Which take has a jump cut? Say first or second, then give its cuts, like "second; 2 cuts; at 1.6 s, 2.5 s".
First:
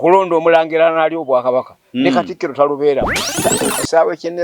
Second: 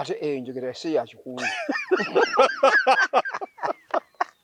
first; 1 cut; at 3.3 s